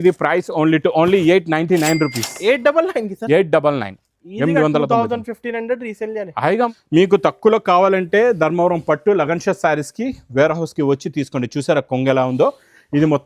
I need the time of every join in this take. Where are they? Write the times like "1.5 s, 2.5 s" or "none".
6.7 s

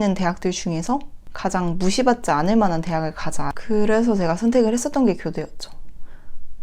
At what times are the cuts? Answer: 3.5 s

